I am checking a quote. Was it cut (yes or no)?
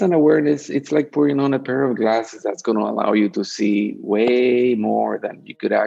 no